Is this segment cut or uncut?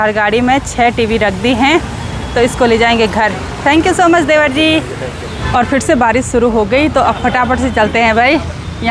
uncut